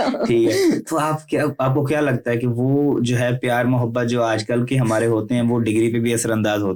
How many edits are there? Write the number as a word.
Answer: zero